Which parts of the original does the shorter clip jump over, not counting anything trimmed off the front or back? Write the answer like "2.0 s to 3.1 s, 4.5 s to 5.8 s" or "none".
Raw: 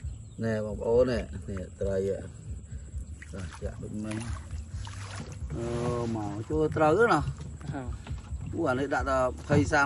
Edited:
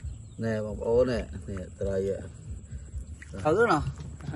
3.4 s to 6.9 s